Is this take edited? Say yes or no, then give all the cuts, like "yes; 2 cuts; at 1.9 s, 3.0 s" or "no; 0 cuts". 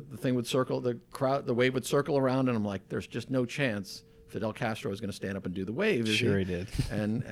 no; 0 cuts